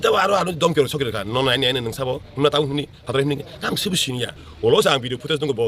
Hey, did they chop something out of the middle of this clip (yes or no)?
yes